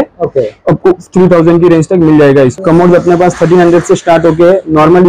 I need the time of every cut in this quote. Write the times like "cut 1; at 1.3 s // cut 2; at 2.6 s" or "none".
cut 1; at 2.6 s